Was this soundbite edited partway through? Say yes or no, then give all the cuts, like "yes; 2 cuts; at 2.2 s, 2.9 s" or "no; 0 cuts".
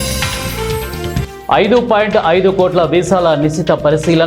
yes; 1 cut; at 1.3 s